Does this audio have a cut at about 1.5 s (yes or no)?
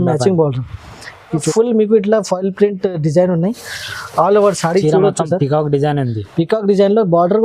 yes